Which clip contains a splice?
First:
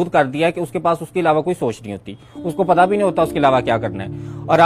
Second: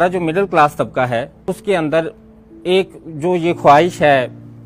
second; 1 cut; at 1.3 s

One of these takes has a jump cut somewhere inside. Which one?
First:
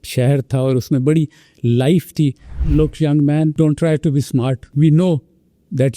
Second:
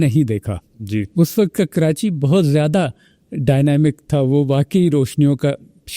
first; 3 cuts; at 2.5 s, 3.5 s, 4.6 s

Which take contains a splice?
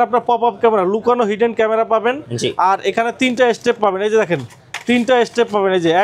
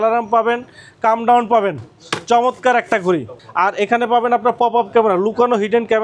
second; 1 cut; at 3.4 s

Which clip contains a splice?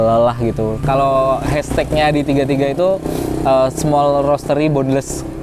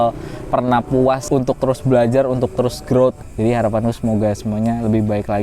second; 2 cuts; at 1.2 s, 3.2 s

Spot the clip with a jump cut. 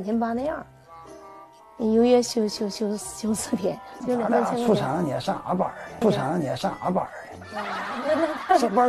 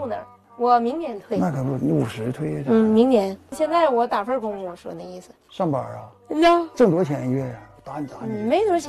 first; 1 cut; at 3.9 s

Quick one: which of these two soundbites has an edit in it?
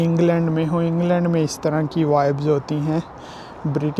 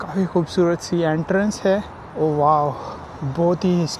second; 1 cut; at 2.0 s

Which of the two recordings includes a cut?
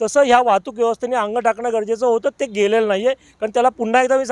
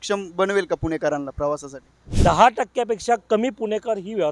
second; 1 cut; at 2.0 s

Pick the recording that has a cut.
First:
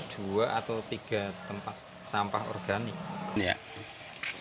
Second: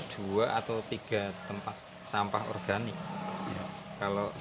first; 1 cut; at 3.4 s

